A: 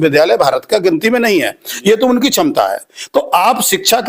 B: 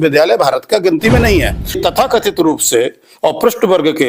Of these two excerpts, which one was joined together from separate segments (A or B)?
B